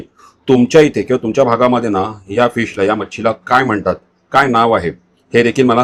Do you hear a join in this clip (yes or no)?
no